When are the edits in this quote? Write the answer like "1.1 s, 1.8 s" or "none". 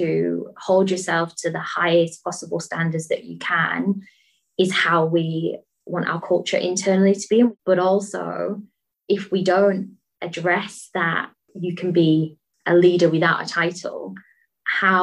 7.5 s, 11.5 s

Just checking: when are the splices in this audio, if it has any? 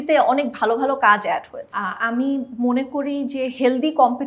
1.6 s

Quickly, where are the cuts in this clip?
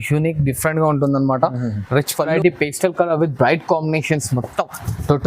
2.3 s

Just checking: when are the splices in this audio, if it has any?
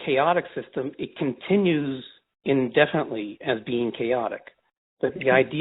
none

